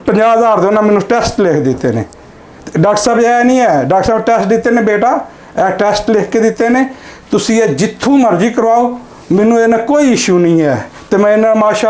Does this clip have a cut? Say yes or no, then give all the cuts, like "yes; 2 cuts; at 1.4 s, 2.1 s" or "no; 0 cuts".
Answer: no; 0 cuts